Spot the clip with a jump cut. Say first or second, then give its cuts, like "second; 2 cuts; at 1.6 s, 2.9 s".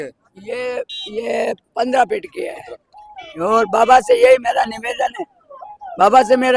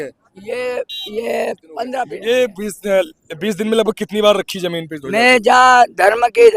second; 1 cut; at 2.0 s